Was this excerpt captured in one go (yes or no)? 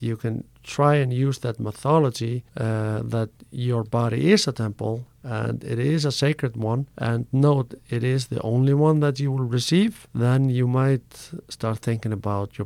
no